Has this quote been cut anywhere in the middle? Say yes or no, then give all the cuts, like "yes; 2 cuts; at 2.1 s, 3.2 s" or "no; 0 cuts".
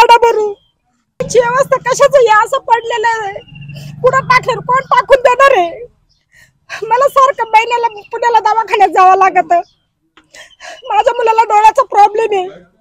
yes; 1 cut; at 1.3 s